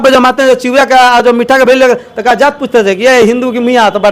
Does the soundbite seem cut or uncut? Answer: uncut